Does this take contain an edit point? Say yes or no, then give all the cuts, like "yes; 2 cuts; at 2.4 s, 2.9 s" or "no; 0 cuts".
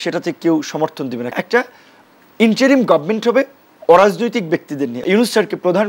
yes; 2 cuts; at 1.3 s, 5.0 s